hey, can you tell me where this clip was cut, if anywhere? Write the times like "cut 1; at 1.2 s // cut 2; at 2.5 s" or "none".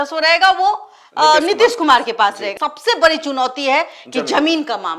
cut 1; at 2.5 s